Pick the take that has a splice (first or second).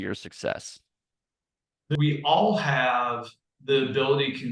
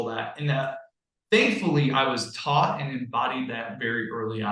first